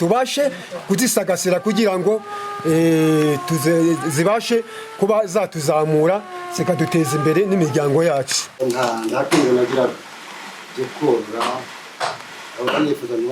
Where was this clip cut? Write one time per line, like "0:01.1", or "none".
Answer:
0:08.6

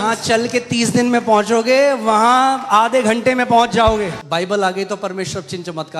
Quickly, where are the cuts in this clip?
0:04.2

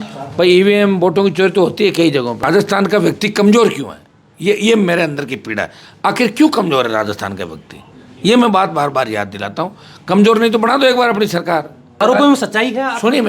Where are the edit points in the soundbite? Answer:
0:02.4
0:11.9

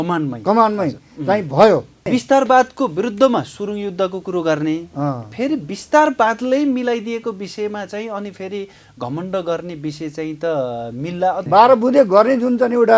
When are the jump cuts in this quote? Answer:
0:02.1
0:11.4

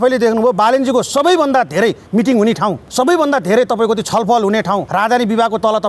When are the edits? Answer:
0:02.8
0:04.9

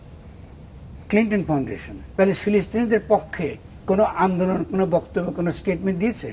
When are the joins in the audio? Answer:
0:02.1

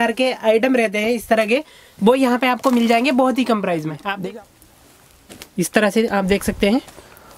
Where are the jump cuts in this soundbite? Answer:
0:04.2

